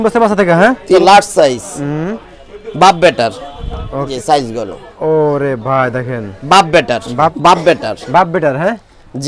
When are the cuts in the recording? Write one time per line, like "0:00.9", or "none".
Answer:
0:01.0
0:04.1
0:07.3